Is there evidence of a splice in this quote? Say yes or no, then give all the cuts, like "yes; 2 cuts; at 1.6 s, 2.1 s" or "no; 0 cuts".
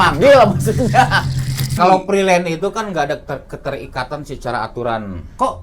yes; 1 cut; at 1.7 s